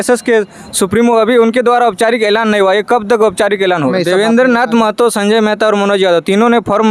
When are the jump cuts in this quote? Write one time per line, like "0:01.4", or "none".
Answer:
0:03.9